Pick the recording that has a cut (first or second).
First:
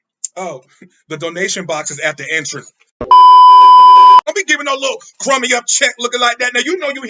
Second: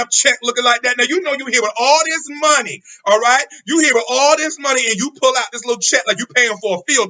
first